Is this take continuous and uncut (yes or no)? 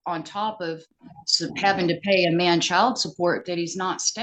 yes